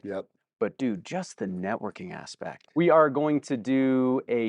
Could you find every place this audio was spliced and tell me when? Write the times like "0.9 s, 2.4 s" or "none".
2.6 s